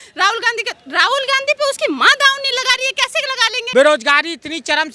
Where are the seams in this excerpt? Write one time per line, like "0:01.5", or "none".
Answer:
0:03.5